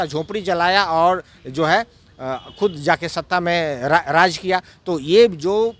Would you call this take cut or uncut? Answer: uncut